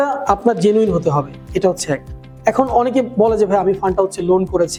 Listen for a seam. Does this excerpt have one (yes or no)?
no